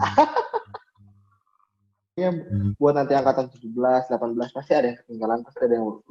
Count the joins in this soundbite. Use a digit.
1